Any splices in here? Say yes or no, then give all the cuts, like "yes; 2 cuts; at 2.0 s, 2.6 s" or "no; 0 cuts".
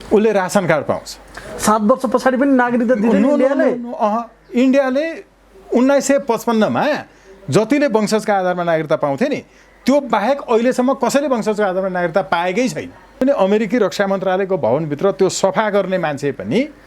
yes; 1 cut; at 13.2 s